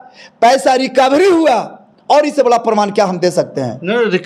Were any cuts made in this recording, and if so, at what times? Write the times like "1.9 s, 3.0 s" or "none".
none